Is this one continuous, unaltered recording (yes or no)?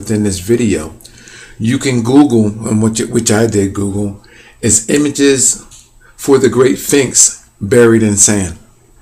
yes